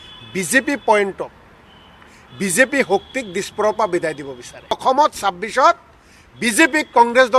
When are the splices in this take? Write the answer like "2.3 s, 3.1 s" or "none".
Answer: 4.8 s